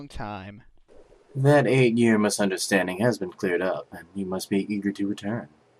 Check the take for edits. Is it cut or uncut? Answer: cut